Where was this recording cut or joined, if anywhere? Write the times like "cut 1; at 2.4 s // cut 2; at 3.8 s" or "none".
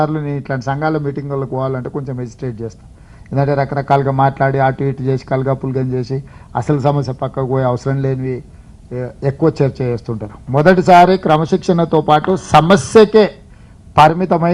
cut 1; at 2.8 s